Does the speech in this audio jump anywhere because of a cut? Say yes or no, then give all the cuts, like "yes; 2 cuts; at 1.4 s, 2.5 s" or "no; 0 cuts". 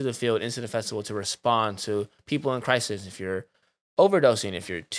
no; 0 cuts